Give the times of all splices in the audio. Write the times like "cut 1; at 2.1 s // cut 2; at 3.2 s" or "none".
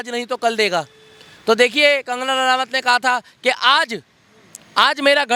none